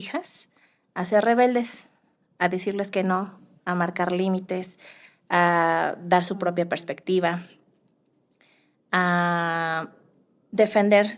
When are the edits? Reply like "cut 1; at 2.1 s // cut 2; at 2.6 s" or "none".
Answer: none